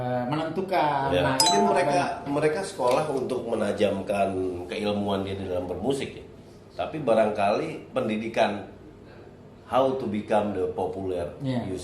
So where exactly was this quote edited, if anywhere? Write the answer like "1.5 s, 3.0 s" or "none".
1.5 s